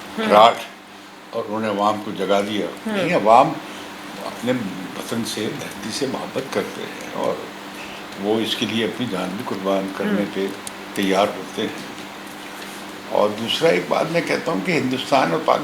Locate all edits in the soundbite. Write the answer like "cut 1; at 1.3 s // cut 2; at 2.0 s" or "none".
none